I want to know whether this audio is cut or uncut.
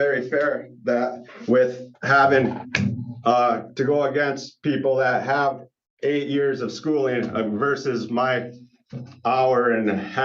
uncut